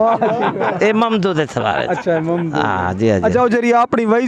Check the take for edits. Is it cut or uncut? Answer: uncut